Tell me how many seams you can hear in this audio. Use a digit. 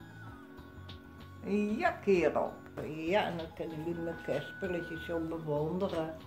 1